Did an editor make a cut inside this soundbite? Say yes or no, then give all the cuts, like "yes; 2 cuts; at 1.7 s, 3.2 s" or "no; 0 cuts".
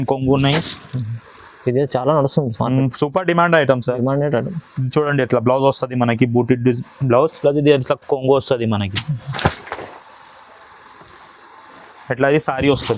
no; 0 cuts